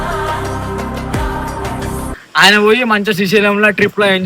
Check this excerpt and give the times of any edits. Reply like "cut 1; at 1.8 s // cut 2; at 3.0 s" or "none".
cut 1; at 2.2 s